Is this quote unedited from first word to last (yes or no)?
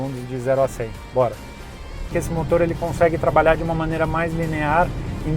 no